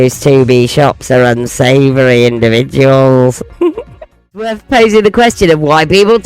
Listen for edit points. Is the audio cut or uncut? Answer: cut